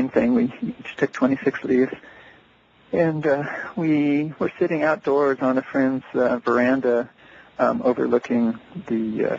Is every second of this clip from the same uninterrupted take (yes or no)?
no